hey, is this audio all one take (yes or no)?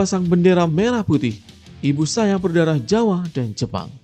yes